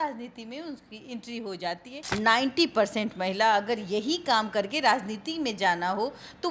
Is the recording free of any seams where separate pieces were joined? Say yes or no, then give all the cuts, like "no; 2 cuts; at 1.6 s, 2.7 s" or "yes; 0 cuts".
no; 1 cut; at 2.0 s